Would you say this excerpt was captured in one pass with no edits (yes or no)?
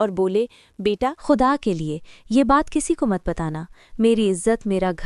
no